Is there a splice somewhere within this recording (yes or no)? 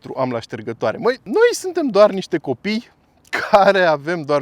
yes